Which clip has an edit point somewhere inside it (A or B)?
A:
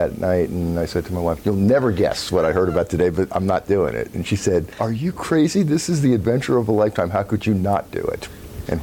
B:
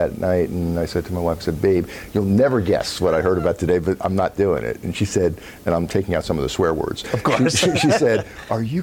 A